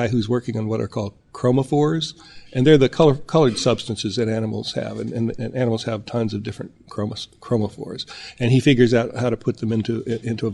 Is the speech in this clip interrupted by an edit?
no; 0 cuts

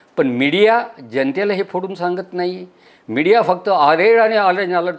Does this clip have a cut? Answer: no; 0 cuts

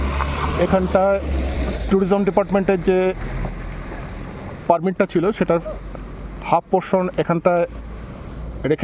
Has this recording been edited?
no; 0 cuts

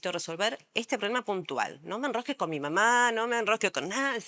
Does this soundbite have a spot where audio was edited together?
no; 0 cuts

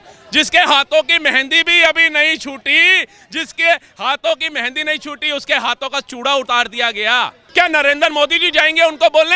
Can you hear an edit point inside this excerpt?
yes; 1 cut; at 7.4 s

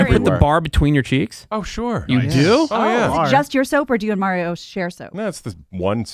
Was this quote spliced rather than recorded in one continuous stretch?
yes; 1 cut; at 3.1 s

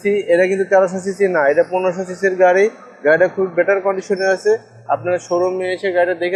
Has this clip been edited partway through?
no; 0 cuts

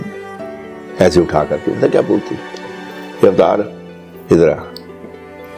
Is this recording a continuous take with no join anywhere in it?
no; 1 cut; at 4.7 s

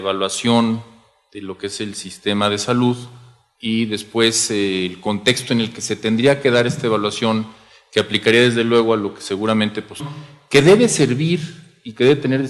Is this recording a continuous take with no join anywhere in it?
yes; 0 cuts

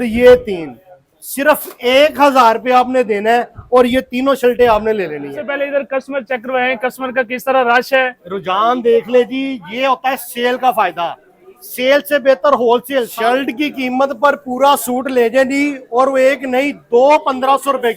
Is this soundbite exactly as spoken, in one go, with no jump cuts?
no; 2 cuts; at 5.5 s, 13.1 s

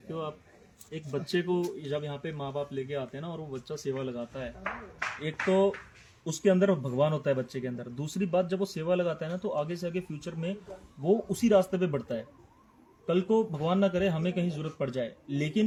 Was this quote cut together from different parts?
no; 0 cuts

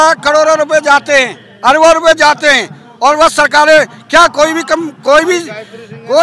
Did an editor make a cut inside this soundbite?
no; 0 cuts

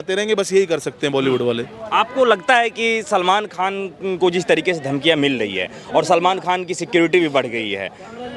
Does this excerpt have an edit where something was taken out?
no; 0 cuts

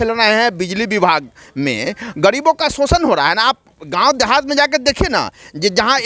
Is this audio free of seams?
yes; 0 cuts

